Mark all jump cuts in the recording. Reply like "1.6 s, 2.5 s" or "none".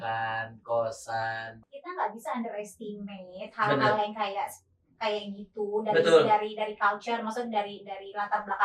1.5 s